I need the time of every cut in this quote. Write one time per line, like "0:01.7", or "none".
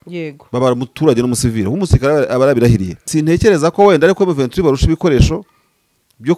0:02.9